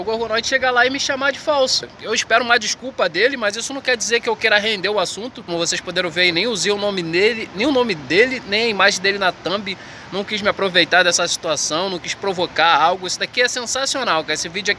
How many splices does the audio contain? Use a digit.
2